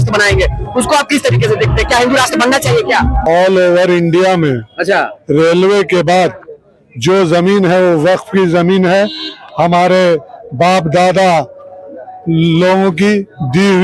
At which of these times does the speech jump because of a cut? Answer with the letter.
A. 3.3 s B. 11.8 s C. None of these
A